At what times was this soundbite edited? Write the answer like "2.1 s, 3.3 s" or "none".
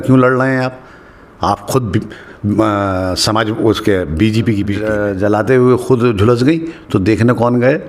4.9 s